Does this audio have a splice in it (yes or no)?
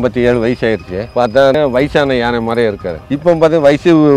yes